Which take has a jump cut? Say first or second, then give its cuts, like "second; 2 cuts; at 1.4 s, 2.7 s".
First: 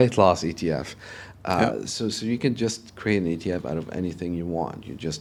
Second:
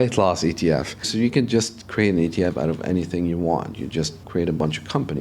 second; 2 cuts; at 1.1 s, 4.2 s